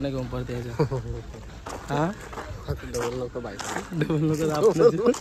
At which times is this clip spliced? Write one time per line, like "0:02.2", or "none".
none